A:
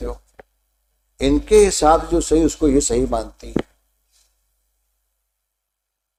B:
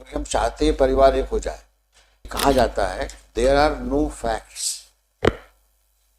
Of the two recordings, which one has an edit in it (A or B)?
B